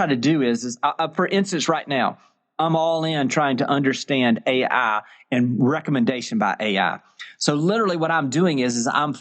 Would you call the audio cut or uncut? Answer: uncut